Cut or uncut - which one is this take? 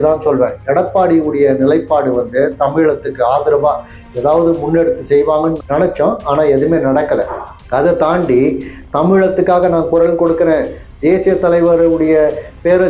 uncut